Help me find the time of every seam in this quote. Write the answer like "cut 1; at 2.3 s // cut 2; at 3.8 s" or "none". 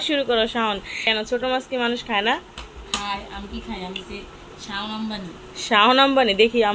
cut 1; at 1.0 s